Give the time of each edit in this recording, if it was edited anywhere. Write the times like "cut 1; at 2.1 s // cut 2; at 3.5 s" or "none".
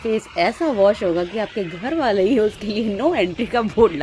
none